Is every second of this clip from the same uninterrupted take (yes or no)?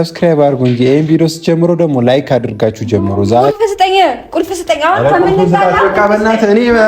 no